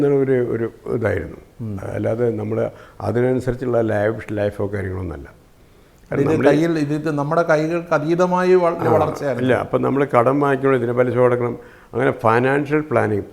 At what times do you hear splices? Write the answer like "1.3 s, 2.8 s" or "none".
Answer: none